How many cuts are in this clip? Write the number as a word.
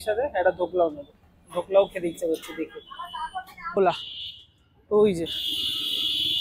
one